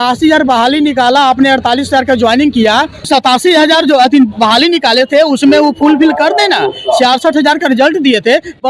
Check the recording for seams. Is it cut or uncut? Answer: cut